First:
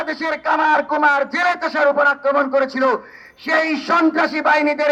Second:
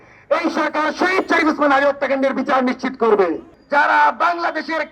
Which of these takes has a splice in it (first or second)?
second